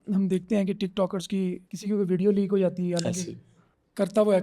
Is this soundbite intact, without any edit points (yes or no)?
no